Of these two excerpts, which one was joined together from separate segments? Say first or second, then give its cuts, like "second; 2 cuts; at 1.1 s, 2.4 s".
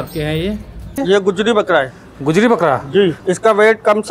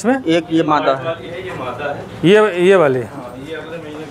first; 2 cuts; at 1.0 s, 3.2 s